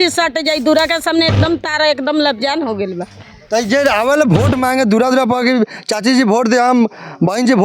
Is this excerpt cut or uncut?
uncut